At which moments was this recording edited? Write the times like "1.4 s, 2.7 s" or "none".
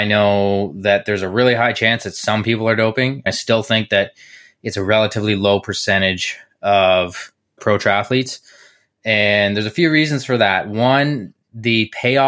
3.3 s, 7.6 s

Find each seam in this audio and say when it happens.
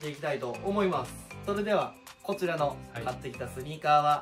1.2 s

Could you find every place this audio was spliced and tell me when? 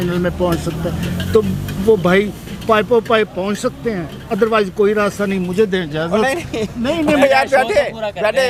none

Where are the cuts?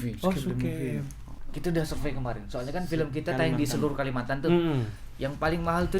1.2 s

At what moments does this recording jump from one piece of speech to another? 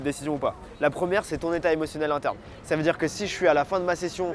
none

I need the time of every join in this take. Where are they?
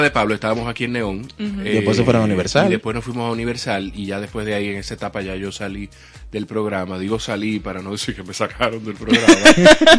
none

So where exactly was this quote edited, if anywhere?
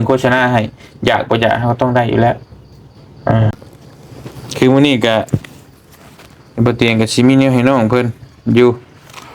3.5 s

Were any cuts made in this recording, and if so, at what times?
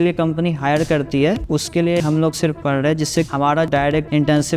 3.3 s

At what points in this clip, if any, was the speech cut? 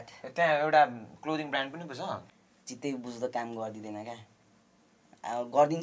2.3 s

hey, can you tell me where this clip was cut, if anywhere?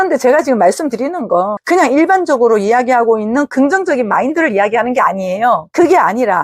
1.6 s

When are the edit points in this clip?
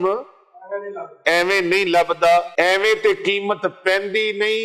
2.5 s

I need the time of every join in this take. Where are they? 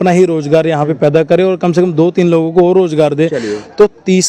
none

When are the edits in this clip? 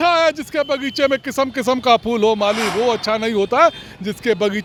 none

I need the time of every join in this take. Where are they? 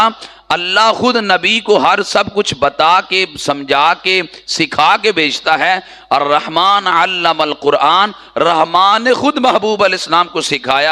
none

